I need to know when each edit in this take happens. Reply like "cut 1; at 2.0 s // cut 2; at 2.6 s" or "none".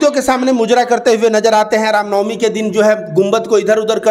none